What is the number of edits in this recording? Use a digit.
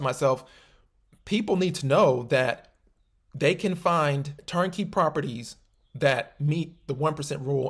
0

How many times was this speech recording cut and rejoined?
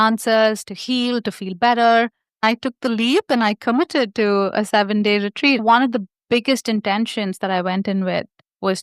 2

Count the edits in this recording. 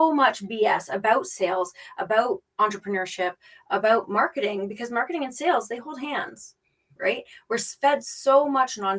0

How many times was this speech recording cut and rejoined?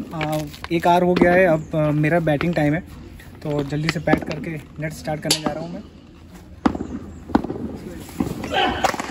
0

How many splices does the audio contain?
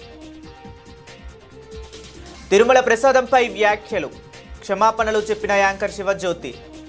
0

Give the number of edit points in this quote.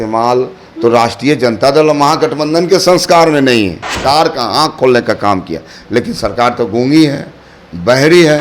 1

